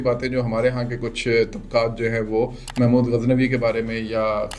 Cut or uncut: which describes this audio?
uncut